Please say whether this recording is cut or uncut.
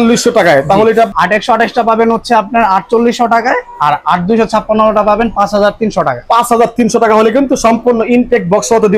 cut